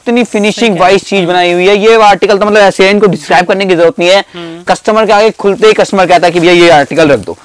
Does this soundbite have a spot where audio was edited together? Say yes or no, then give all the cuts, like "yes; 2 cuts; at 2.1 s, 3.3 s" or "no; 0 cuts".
no; 0 cuts